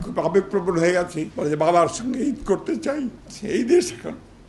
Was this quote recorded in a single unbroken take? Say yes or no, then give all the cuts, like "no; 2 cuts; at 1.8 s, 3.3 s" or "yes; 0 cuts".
no; 2 cuts; at 1.2 s, 3.3 s